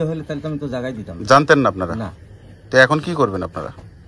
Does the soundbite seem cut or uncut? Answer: uncut